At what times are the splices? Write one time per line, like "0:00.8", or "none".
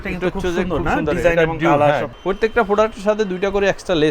0:02.1